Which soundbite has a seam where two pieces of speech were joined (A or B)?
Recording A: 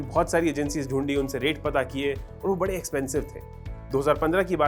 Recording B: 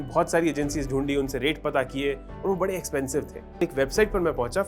B